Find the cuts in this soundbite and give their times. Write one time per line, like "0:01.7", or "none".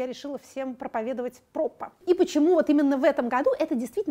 0:01.9